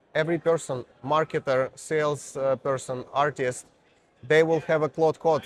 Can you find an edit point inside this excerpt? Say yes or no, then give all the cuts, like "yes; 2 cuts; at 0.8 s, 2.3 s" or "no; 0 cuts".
no; 0 cuts